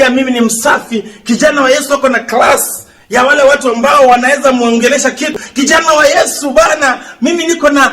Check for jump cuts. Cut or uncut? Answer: cut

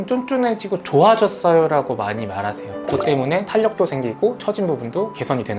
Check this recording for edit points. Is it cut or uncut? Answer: cut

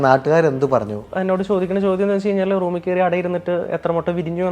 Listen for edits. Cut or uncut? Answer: cut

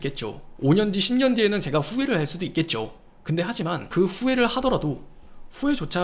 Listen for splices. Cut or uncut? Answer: cut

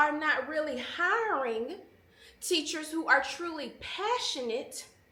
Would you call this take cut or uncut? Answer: uncut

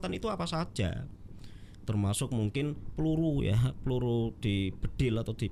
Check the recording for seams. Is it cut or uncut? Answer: uncut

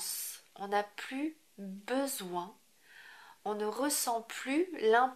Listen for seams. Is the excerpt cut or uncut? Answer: uncut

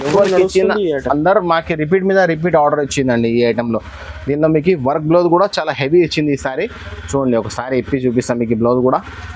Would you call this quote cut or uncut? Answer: uncut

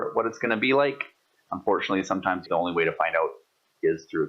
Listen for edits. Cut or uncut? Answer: cut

